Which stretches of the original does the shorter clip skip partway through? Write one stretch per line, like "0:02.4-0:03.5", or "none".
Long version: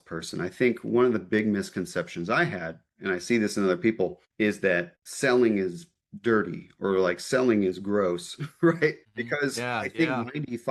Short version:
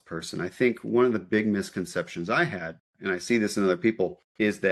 none